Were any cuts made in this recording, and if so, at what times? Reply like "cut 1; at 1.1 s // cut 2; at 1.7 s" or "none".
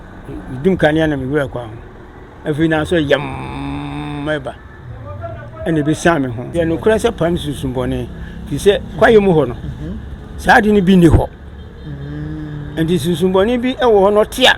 cut 1; at 6.5 s